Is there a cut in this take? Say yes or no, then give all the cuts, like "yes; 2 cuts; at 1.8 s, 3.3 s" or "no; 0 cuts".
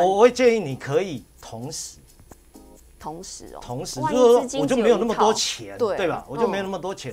no; 0 cuts